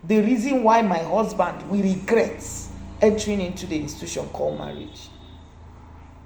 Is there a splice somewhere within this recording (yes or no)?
no